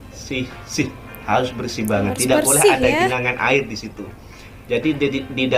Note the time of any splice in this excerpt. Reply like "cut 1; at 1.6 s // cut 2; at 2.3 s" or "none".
none